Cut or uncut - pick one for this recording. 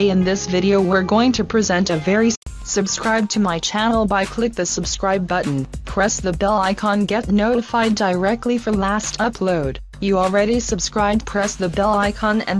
uncut